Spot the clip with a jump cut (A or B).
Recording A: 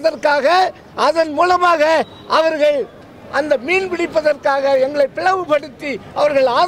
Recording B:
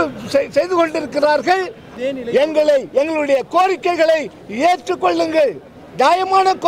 B